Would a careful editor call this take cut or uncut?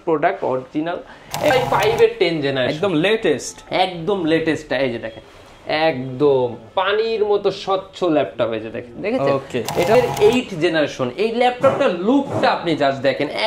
cut